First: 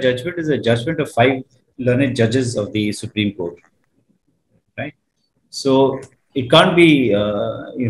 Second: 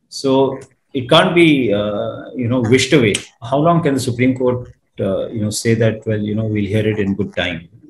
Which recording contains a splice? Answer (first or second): second